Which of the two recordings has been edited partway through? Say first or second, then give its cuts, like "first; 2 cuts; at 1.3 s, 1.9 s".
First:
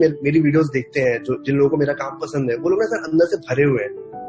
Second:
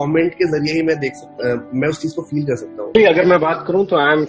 second; 1 cut; at 2.9 s